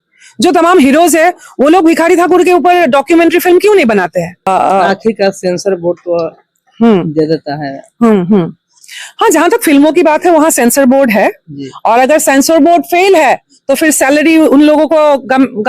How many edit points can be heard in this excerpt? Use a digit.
1